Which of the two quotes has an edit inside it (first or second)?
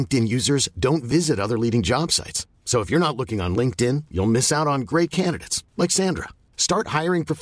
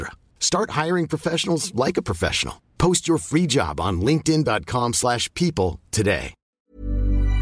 second